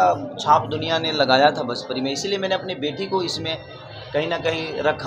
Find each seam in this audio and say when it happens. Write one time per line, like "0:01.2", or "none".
none

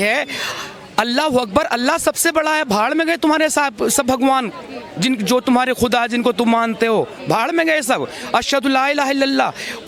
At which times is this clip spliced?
none

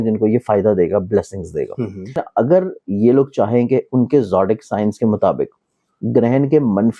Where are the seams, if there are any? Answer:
0:02.2

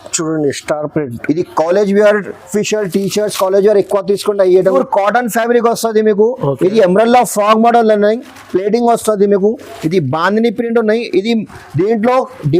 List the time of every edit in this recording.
0:02.4
0:04.6

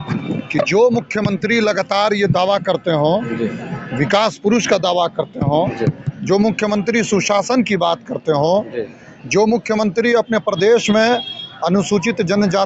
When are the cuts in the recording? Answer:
none

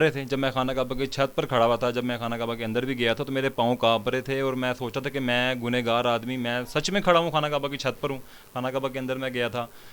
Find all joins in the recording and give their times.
none

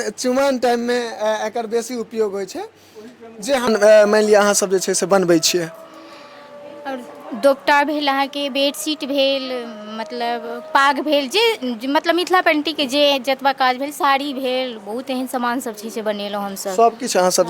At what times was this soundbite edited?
0:03.7

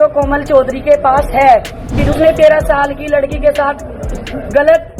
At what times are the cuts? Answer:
0:02.0

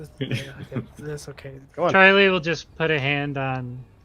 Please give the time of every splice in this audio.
0:01.6

